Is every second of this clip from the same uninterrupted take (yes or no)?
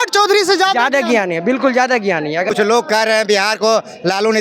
no